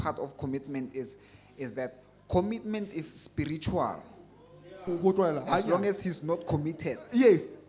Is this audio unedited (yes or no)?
no